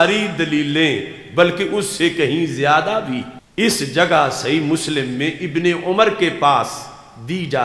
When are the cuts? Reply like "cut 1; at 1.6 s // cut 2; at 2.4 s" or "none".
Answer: cut 1; at 3.4 s